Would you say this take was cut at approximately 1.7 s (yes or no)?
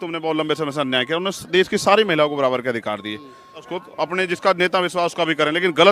no